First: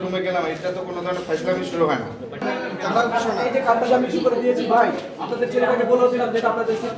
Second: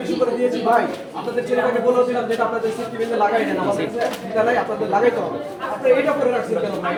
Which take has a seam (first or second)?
first